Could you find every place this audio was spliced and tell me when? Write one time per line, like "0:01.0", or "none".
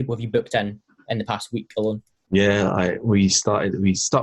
0:02.1